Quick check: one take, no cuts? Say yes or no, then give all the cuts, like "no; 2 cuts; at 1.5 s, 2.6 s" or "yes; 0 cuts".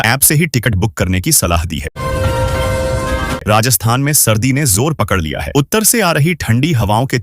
no; 2 cuts; at 1.9 s, 3.4 s